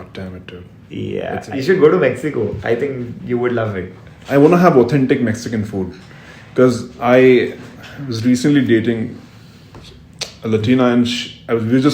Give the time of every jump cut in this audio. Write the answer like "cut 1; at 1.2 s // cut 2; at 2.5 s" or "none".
cut 1; at 1.5 s